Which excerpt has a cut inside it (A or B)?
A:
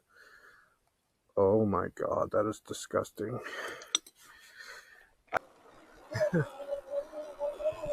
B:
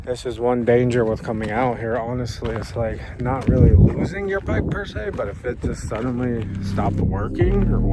A